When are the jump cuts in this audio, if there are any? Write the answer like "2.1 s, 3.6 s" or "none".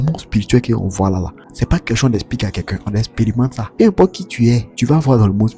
1.4 s, 3.6 s, 4.7 s